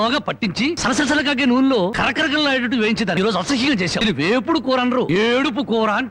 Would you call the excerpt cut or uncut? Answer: cut